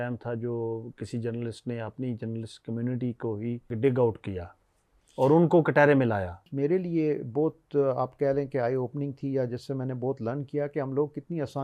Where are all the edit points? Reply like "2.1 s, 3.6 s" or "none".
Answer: 6.4 s